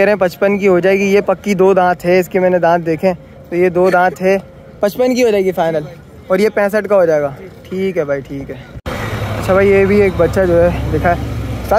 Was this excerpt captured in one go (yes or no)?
yes